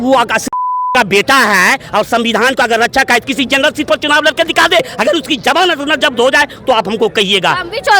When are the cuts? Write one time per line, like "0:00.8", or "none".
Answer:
0:04.9